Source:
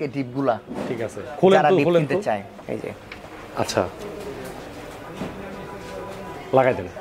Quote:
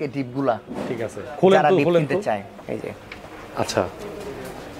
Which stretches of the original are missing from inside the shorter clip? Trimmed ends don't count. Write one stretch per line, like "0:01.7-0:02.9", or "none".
none